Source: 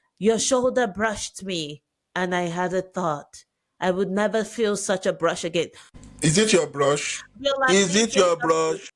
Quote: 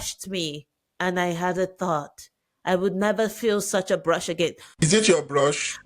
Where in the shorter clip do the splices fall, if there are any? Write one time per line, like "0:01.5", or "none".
0:04.8